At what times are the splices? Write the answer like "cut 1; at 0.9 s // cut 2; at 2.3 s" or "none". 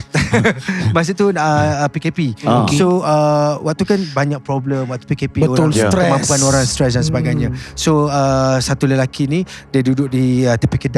none